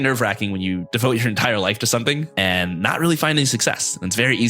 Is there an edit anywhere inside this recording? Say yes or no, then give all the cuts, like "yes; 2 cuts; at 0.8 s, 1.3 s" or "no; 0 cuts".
yes; 2 cuts; at 0.9 s, 2.3 s